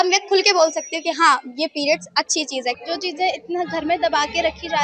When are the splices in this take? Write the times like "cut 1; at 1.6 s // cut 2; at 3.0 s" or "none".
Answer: cut 1; at 2.8 s